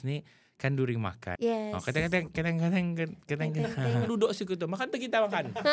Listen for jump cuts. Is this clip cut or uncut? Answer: cut